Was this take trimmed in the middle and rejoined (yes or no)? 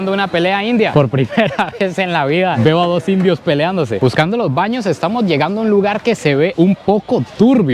yes